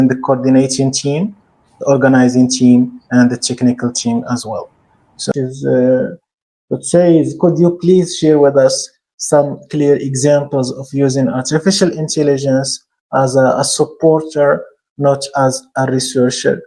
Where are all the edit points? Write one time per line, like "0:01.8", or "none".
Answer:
0:05.3